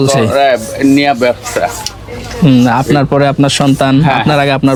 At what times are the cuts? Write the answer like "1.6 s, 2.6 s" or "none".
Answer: none